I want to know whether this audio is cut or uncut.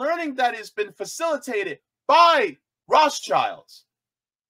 cut